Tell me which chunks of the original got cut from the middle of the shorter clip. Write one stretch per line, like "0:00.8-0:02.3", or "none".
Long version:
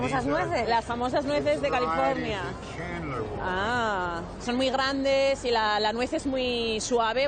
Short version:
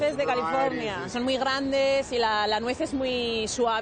0:02.5-0:04.4